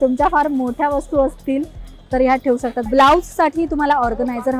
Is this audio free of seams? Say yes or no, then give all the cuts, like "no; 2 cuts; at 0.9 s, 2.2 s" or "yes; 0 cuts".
no; 1 cut; at 2.8 s